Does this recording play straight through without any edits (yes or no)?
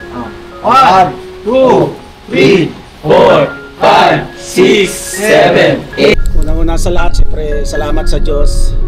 no